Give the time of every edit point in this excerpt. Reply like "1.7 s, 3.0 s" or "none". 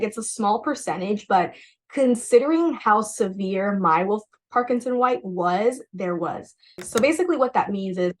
6.8 s